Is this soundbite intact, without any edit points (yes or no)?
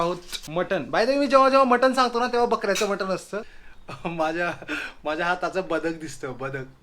no